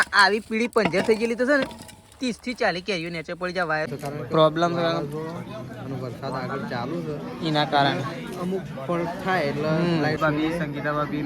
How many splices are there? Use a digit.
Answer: 2